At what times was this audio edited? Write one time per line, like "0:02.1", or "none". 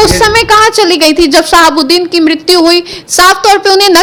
none